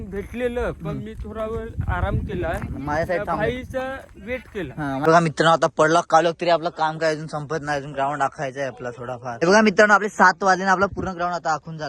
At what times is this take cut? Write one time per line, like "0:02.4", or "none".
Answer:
0:05.1
0:09.3